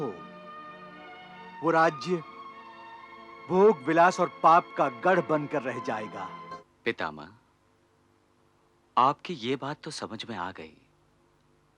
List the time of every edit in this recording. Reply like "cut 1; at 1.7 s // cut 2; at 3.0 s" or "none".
cut 1; at 6.5 s